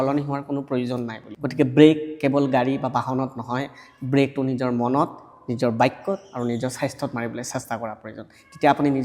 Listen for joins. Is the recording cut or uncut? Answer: cut